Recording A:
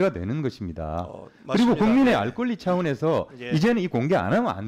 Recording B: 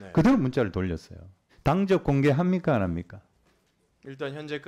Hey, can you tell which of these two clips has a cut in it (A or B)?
B